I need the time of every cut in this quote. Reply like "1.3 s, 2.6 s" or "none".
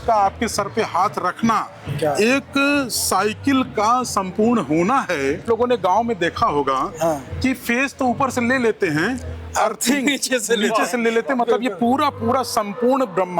5.4 s